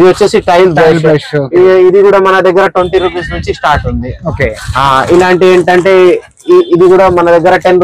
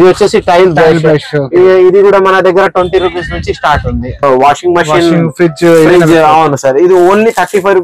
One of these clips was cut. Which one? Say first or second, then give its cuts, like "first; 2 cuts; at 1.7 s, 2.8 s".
second; 1 cut; at 4.2 s